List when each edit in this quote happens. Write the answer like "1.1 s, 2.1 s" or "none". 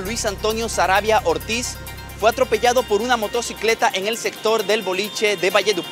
none